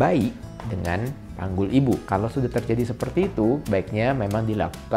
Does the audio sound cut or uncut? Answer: cut